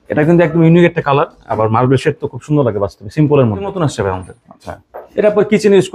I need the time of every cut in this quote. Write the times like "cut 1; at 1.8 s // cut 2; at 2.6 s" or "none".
cut 1; at 3.7 s

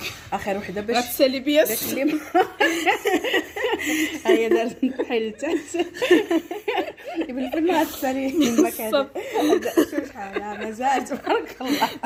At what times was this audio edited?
none

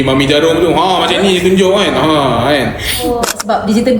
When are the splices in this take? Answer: cut 1; at 3.1 s

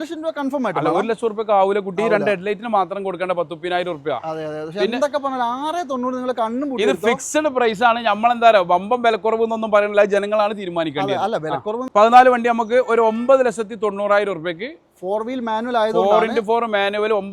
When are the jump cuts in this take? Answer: cut 1; at 11.9 s

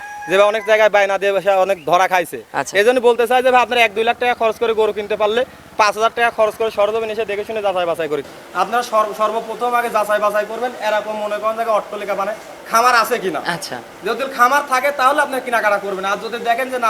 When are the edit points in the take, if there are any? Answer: cut 1; at 8.3 s

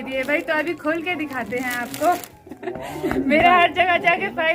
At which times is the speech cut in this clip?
cut 1; at 2.4 s

